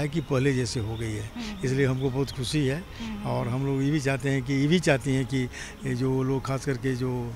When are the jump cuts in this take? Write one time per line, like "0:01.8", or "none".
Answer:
none